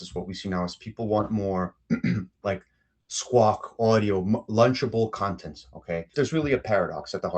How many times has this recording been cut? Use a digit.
1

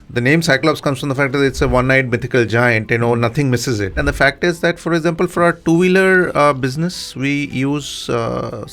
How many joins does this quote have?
1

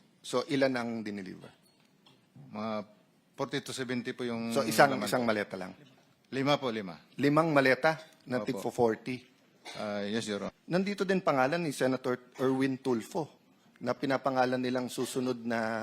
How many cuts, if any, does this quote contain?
1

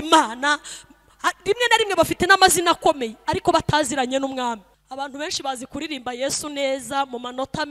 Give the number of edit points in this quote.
1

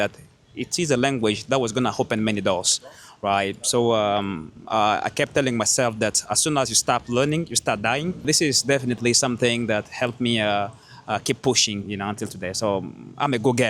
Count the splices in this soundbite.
2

